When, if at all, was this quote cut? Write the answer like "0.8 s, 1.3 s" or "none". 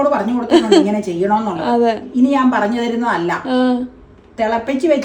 2.1 s